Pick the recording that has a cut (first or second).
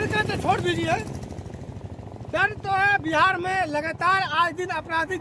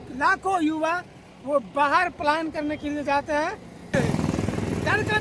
second